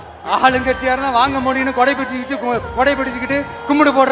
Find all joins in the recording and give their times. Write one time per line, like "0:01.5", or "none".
none